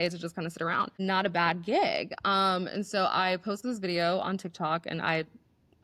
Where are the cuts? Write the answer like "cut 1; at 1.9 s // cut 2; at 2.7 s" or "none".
none